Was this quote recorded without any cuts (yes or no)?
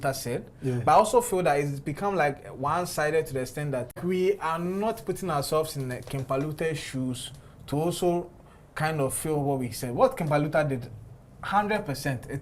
no